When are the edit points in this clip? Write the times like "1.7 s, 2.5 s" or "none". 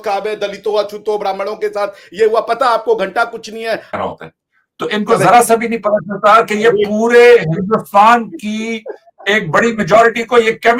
4.0 s